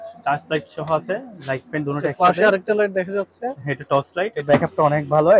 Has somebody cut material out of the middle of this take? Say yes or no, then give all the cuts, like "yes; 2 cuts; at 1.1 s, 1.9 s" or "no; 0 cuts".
yes; 1 cut; at 4.4 s